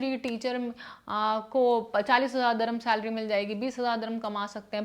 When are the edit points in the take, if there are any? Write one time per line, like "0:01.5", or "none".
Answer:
none

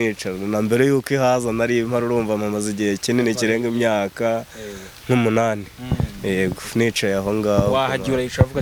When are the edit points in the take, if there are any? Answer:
none

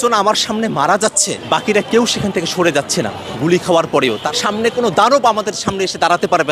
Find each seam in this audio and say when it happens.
0:01.3
0:04.3

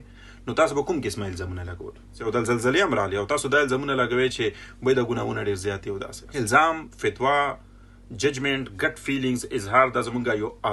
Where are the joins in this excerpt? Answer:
0:02.2
0:06.2

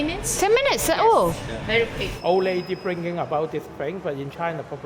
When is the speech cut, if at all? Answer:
0:02.1

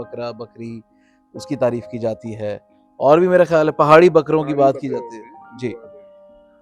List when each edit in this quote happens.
none

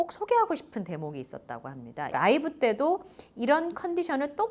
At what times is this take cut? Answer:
0:02.1

